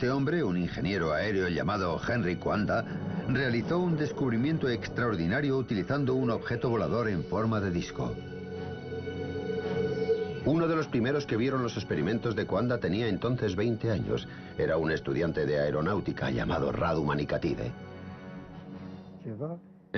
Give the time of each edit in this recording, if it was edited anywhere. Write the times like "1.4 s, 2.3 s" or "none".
7.5 s